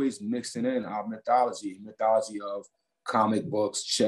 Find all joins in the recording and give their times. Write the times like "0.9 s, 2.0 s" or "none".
none